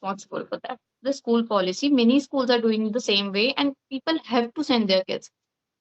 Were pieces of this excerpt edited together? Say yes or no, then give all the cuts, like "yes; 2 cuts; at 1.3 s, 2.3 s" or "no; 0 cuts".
yes; 1 cut; at 0.9 s